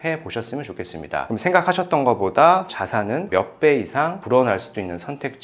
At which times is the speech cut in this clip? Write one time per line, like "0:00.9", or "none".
0:02.7